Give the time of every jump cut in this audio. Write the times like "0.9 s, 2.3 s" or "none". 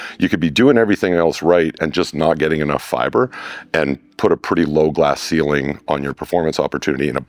none